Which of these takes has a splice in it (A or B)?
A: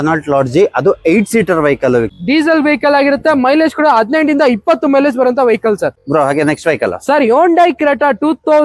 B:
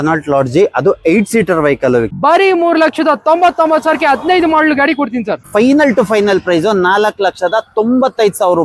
B